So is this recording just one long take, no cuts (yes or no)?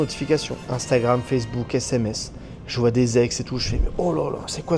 yes